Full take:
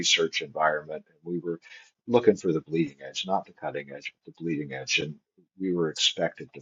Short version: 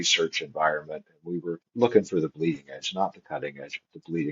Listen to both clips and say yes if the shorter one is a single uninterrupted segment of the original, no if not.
no